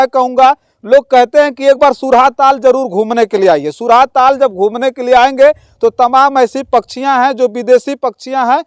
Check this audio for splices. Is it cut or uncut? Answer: uncut